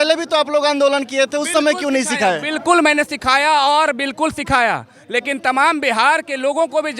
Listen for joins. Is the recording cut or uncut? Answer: uncut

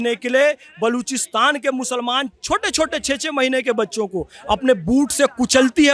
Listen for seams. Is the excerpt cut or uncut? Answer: uncut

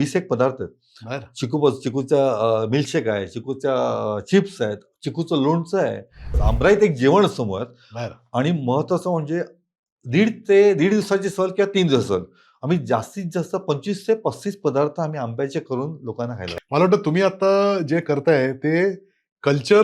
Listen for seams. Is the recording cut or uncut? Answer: cut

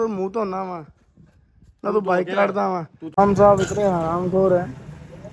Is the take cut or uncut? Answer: cut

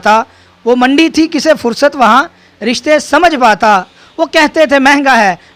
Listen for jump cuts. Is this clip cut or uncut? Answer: uncut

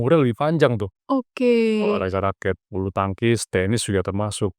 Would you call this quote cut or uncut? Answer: cut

